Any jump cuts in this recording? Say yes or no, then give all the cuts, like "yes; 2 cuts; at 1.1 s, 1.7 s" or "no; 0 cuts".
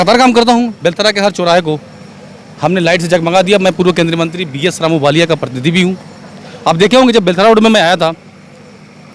no; 0 cuts